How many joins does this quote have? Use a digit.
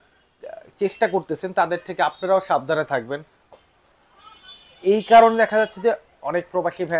0